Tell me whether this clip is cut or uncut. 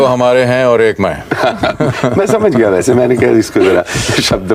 uncut